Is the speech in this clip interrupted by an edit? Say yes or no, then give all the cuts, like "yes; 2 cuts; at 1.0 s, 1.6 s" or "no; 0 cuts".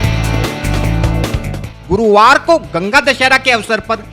yes; 1 cut; at 1.6 s